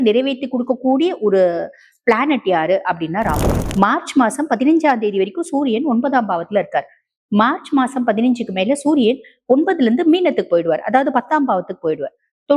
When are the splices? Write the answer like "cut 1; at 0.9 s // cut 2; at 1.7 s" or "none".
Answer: cut 1; at 3.6 s